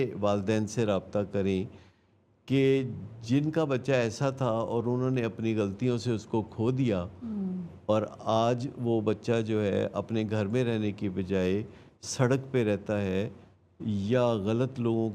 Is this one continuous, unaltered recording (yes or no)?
yes